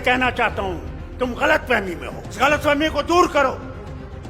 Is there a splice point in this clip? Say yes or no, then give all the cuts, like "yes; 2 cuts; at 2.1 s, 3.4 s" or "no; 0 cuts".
yes; 1 cut; at 2.4 s